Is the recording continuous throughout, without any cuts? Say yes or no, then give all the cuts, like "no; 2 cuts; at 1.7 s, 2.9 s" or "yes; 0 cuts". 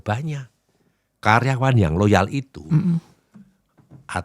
no; 1 cut; at 1.1 s